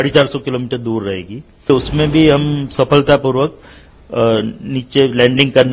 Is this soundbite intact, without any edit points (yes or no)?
no